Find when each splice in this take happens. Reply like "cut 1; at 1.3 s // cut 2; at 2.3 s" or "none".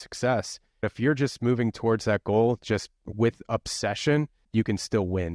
cut 1; at 0.9 s // cut 2; at 4.4 s